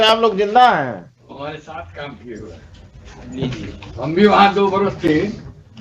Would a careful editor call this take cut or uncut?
uncut